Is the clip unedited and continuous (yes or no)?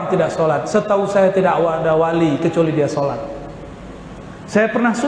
yes